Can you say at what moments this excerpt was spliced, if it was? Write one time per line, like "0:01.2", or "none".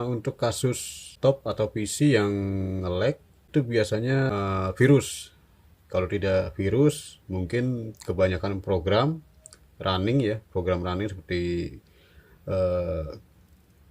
0:01.1
0:03.5
0:04.3